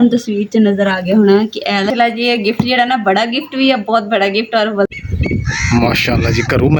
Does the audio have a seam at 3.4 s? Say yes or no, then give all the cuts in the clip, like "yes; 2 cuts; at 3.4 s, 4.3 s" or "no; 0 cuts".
no; 2 cuts; at 1.9 s, 4.9 s